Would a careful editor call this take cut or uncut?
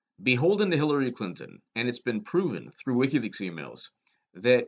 cut